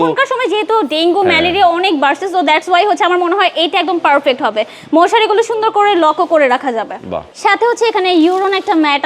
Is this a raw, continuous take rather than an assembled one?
no; 1 cut; at 7.3 s

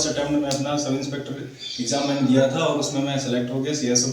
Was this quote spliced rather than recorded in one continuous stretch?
no; 0 cuts

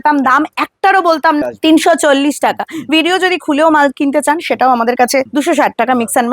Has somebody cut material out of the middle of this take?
yes; 2 cuts; at 1.4 s, 5.3 s

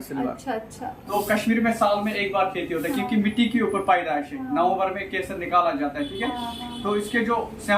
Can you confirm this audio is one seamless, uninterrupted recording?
no; 1 cut; at 1.1 s

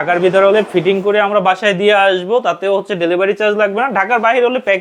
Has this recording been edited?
no; 0 cuts

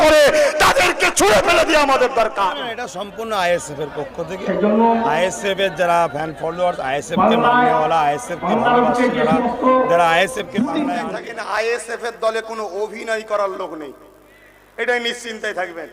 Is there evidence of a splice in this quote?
yes; 2 cuts; at 2.9 s, 11.1 s

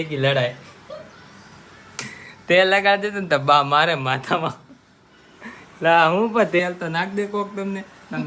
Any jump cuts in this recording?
no; 0 cuts

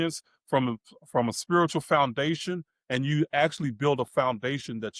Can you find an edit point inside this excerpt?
no; 0 cuts

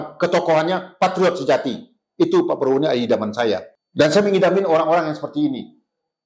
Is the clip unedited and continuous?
no; 1 cut; at 3.8 s

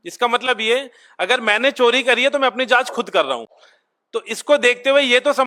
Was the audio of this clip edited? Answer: no; 0 cuts

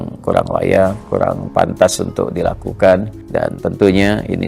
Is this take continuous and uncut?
no; 2 cuts; at 1.0 s, 3.2 s

